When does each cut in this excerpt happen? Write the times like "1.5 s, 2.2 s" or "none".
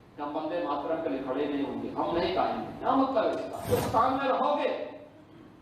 3.7 s